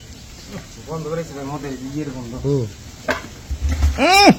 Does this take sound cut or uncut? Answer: uncut